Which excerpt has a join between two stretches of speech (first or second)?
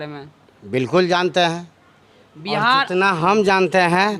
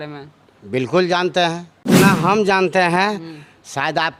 second